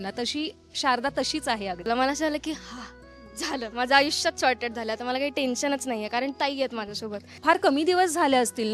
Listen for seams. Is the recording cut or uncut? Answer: cut